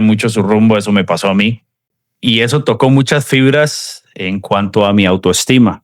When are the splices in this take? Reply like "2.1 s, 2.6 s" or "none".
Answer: none